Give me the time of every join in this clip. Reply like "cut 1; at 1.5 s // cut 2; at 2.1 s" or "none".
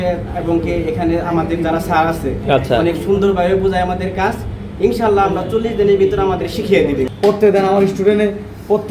cut 1; at 7.1 s